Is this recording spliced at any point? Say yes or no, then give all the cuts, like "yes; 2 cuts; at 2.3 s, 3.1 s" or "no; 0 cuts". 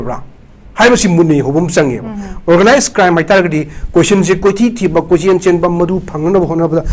no; 0 cuts